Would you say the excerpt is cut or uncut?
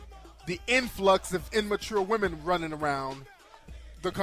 cut